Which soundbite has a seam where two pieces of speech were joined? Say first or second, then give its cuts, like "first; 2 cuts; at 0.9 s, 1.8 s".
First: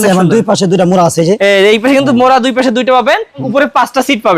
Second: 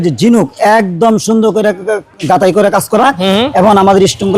first; 1 cut; at 3.5 s